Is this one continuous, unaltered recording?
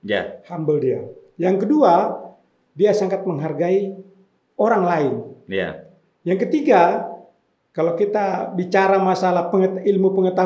yes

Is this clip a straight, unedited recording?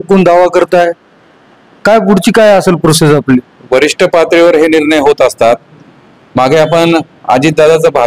yes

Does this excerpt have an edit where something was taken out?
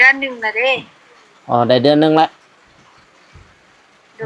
no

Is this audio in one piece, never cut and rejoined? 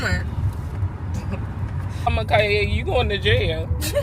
no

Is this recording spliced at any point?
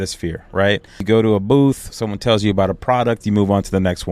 yes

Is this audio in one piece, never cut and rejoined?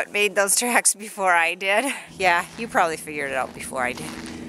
no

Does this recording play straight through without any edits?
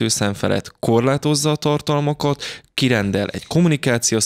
yes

